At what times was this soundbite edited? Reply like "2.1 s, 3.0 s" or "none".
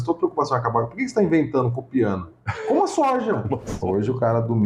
3.7 s